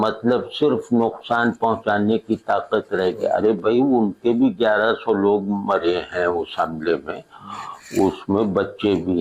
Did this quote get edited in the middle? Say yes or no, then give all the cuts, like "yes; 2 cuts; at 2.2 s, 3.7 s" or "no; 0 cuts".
no; 0 cuts